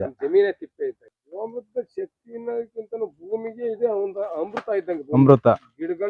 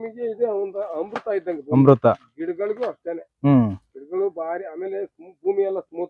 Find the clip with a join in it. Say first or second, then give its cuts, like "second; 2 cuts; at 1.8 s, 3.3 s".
first; 1 cut; at 1.0 s